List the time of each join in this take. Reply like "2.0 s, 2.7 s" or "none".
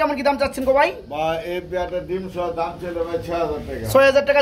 none